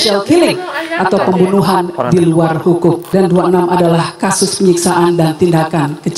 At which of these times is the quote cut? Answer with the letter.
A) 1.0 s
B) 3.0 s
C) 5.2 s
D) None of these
B